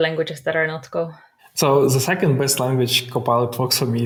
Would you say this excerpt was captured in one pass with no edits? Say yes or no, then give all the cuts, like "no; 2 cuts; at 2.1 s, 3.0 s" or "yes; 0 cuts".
yes; 0 cuts